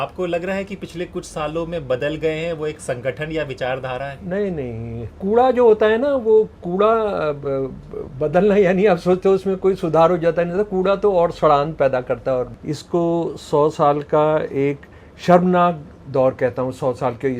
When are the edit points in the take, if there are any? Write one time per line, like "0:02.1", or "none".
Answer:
0:05.1
0:12.6